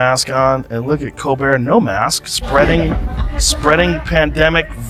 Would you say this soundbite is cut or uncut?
uncut